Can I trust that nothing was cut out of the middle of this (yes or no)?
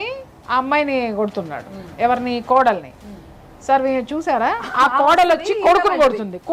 yes